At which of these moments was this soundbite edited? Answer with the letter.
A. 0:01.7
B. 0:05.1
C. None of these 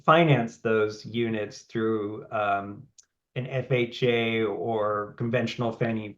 B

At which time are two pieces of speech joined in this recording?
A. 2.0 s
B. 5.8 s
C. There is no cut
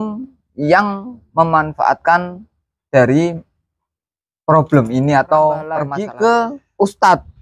B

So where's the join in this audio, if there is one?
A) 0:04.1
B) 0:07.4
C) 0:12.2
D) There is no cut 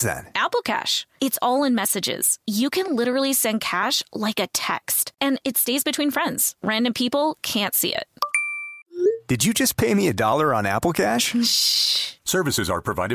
D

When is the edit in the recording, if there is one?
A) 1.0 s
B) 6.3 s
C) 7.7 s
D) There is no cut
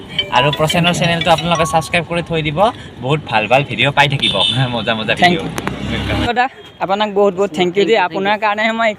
B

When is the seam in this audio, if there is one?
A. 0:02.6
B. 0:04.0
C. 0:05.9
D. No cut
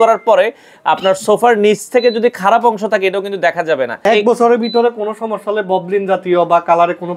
B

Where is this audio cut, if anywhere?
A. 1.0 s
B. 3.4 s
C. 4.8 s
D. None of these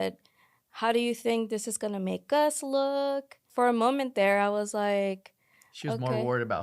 B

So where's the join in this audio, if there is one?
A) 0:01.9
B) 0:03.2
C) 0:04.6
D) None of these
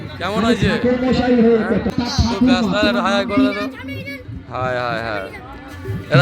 A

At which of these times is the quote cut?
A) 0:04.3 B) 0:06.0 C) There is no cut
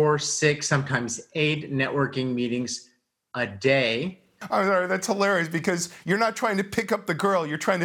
A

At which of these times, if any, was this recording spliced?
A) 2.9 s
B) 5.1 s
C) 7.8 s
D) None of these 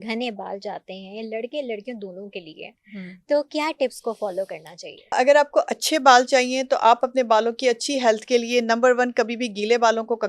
B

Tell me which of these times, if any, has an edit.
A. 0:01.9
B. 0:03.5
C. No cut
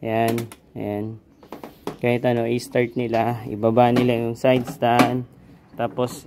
C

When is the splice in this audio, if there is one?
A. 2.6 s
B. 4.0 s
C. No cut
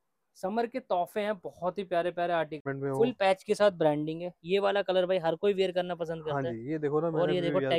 A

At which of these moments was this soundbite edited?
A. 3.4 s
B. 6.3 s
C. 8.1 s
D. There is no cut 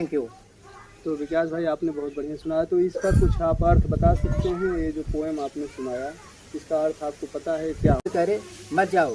C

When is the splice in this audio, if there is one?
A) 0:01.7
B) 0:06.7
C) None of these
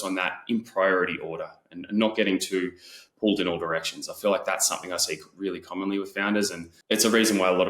B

